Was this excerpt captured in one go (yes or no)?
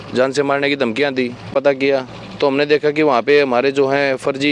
no